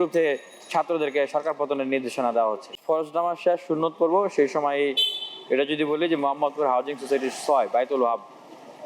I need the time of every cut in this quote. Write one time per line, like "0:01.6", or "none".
0:02.8

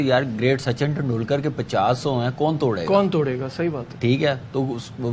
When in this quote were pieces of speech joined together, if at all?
0:04.2

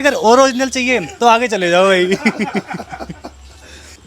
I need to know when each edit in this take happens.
none

